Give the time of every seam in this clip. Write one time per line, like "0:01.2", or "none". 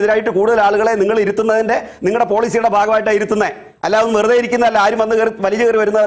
none

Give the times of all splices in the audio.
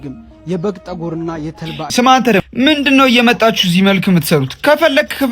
0:01.9

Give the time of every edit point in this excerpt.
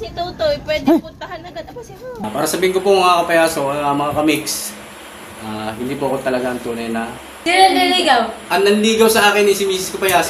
0:02.2
0:07.4

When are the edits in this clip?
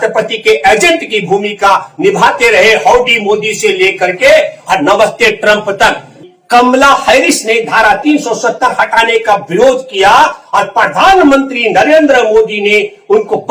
0:06.1

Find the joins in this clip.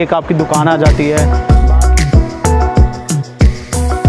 0:01.2

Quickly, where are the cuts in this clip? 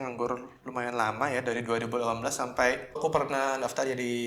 0:03.0

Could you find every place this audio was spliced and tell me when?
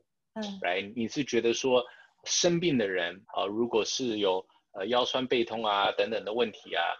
0:00.9
0:03.2

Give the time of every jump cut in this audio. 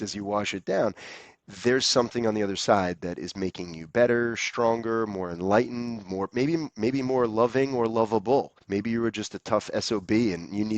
0:08.6

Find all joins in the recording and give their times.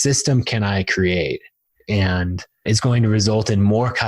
0:01.7
0:02.7

